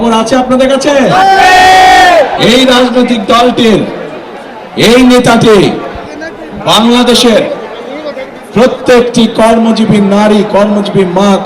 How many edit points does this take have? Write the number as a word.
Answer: one